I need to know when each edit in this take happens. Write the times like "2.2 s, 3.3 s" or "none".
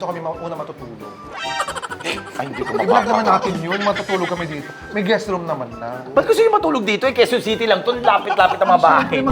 6.0 s